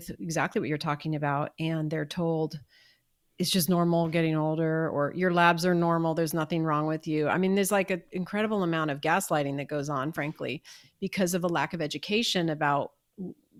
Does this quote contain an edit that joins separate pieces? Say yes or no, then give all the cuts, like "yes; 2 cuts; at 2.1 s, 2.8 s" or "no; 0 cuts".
no; 0 cuts